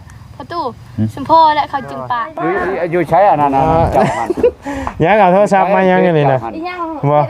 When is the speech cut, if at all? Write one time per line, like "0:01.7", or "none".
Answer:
0:02.2